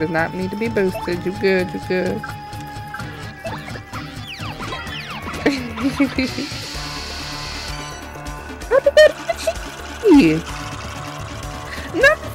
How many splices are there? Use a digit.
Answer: 0